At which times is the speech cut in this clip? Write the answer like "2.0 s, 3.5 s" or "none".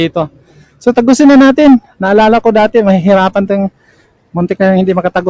none

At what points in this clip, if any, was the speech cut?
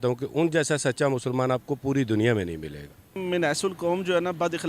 3.2 s

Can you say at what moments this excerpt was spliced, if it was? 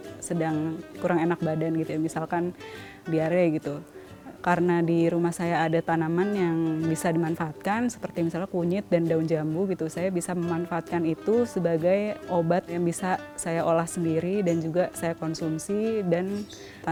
none

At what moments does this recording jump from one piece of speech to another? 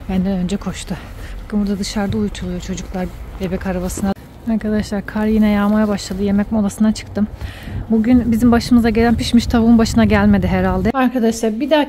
4.2 s, 10.9 s

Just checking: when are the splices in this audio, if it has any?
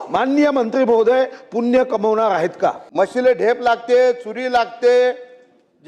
2.8 s

